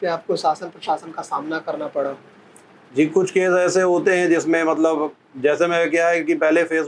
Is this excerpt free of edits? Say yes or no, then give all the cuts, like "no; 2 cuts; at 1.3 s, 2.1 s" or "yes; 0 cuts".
yes; 0 cuts